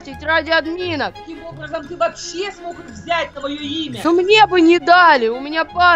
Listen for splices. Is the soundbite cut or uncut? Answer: cut